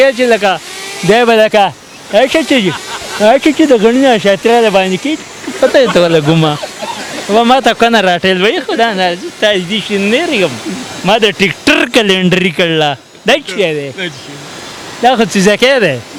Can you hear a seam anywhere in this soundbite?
no; 0 cuts

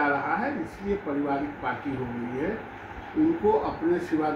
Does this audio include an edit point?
no; 0 cuts

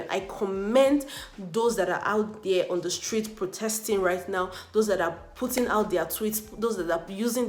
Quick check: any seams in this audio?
no; 0 cuts

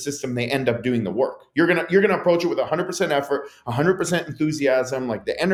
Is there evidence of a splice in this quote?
no; 0 cuts

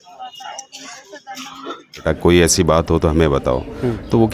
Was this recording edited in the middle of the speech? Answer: yes; 1 cut; at 2.0 s

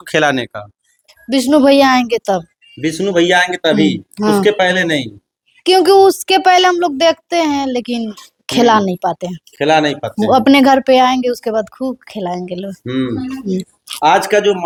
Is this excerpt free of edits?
yes; 0 cuts

